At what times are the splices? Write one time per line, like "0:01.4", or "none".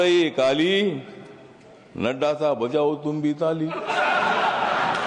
none